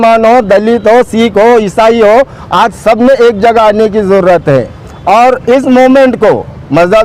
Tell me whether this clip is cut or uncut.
uncut